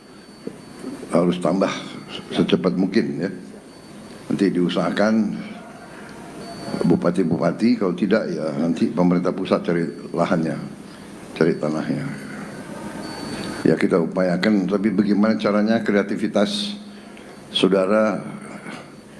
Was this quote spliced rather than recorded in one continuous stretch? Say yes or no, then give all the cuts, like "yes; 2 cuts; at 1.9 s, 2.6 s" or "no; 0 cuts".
no; 0 cuts